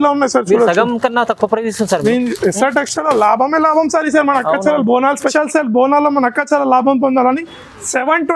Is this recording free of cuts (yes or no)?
no